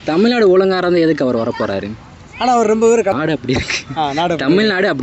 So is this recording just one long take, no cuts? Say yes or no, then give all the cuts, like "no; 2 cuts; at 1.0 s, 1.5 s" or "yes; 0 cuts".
no; 1 cut; at 3.1 s